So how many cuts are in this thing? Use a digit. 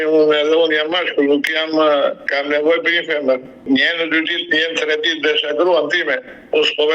1